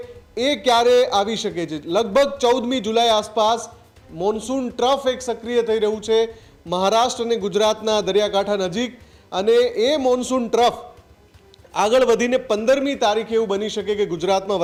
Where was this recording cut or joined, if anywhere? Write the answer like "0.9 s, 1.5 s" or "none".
none